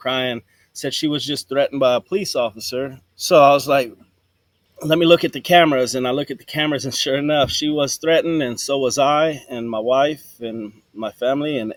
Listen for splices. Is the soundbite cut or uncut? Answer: uncut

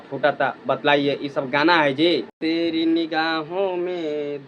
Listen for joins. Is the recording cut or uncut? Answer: cut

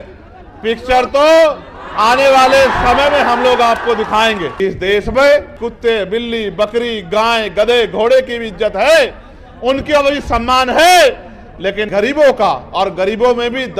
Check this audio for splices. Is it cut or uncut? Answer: cut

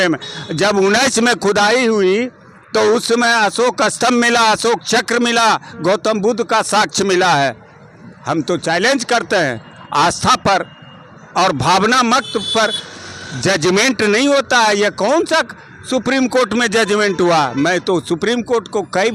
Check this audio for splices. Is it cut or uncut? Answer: uncut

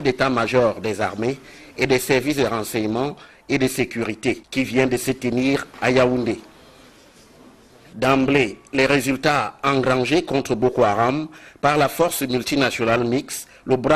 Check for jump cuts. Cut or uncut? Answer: cut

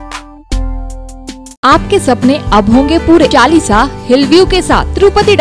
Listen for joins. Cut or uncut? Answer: cut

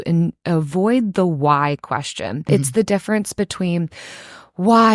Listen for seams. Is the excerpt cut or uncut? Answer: cut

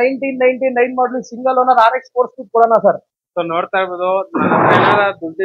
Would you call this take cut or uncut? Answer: uncut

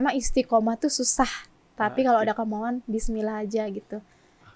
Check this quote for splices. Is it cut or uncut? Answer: uncut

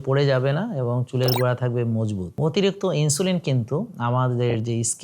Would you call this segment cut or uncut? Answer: cut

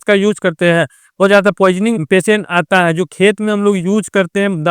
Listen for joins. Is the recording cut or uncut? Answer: cut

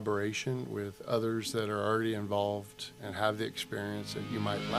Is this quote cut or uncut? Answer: uncut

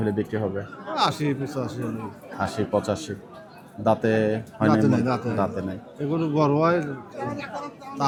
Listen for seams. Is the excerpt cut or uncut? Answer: uncut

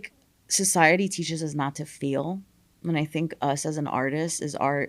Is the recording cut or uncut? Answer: uncut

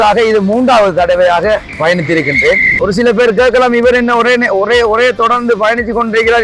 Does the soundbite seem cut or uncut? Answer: cut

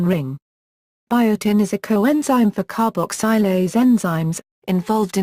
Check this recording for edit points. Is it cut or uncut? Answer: cut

